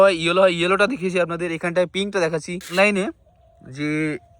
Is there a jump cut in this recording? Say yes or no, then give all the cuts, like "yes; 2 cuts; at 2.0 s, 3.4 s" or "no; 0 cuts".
yes; 1 cut; at 2.7 s